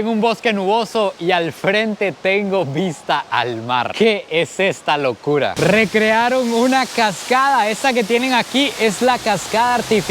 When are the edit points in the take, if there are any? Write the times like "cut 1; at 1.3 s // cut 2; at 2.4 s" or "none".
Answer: cut 1; at 5.5 s

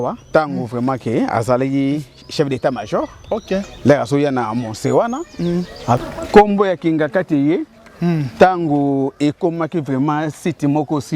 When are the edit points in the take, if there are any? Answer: cut 1; at 6.0 s

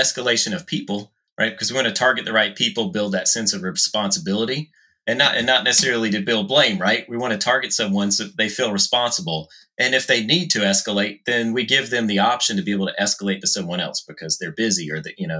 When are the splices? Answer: cut 1; at 1.1 s

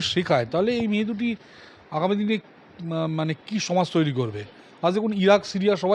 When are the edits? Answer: none

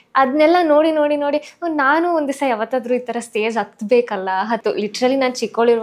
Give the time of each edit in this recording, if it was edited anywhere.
cut 1; at 4.6 s

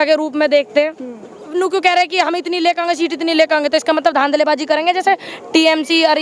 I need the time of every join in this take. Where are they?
cut 1; at 1.5 s

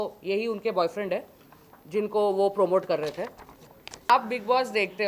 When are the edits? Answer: cut 1; at 4.1 s

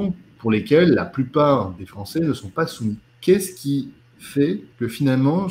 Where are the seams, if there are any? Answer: cut 1; at 3.1 s // cut 2; at 4.7 s

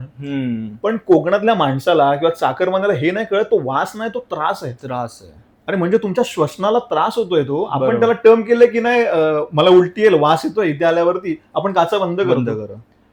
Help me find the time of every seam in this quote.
none

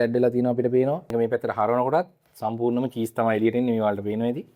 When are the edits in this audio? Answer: cut 1; at 1.1 s

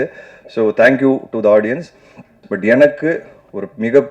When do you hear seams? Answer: cut 1; at 2.5 s

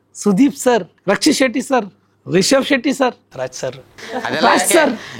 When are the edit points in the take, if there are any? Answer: cut 1; at 0.9 s

